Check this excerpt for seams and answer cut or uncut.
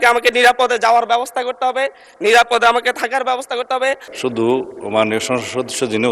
cut